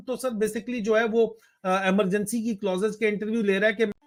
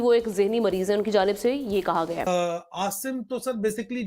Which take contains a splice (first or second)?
second